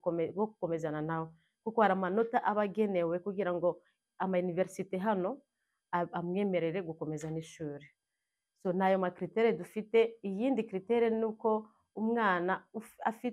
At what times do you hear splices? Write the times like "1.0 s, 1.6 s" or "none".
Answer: none